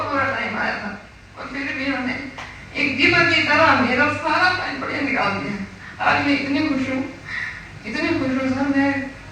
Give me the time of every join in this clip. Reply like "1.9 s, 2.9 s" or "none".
none

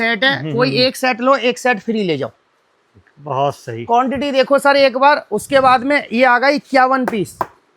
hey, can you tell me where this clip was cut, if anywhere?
none

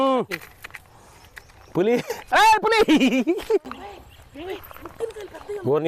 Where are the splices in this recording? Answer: 3.6 s

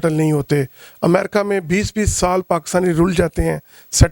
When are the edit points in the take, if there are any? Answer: none

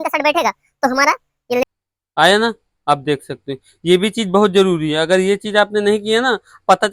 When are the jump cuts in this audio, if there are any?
1.6 s

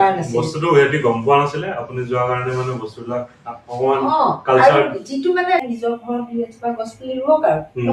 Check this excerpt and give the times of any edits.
5.6 s

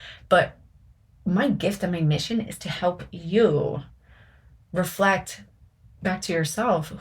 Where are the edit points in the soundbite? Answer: 6.0 s

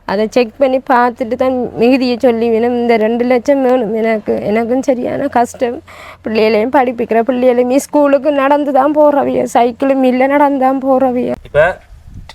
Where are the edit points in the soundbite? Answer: 11.4 s

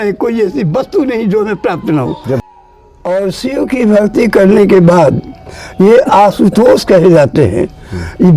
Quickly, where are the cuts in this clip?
2.4 s

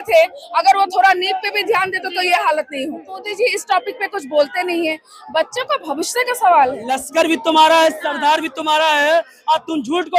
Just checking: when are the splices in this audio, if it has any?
3.3 s, 6.8 s

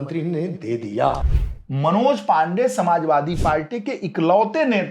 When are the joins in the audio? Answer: 1.2 s

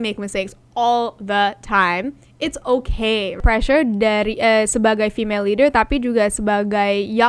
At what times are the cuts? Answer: 3.4 s

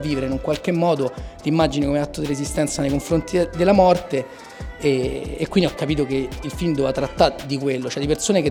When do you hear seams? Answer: none

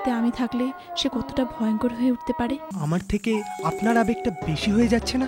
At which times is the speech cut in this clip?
2.7 s

